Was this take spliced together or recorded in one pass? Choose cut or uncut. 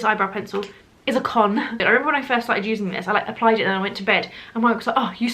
cut